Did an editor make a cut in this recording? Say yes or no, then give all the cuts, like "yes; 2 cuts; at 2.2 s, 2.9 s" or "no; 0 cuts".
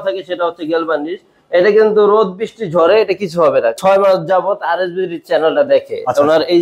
yes; 1 cut; at 3.8 s